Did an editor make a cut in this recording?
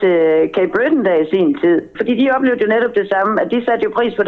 yes; 1 cut; at 1.9 s

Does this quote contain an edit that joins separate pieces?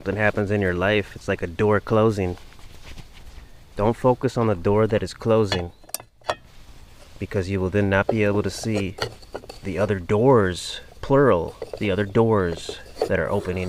no; 0 cuts

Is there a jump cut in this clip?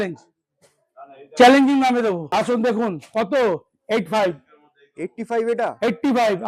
yes; 1 cut; at 2.2 s

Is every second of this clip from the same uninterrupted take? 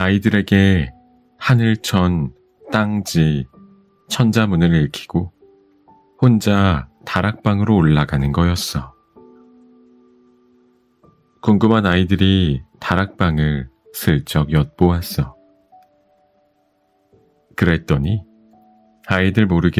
no; 2 cuts; at 9.0 s, 10.8 s

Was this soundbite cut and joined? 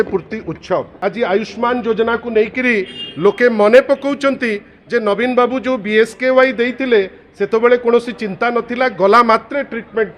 yes; 1 cut; at 0.9 s

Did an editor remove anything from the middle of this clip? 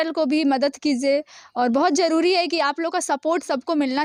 no; 0 cuts

